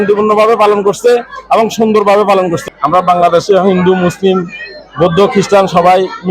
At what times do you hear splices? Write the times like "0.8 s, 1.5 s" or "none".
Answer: 2.6 s